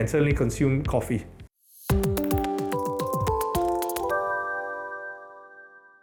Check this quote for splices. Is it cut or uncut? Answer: uncut